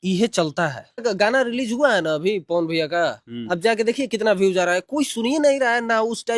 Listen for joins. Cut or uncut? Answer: cut